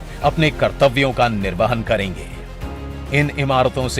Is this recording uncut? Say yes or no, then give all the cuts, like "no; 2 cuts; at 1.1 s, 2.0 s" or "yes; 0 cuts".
yes; 0 cuts